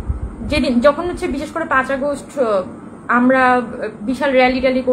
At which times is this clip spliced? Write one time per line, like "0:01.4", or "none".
none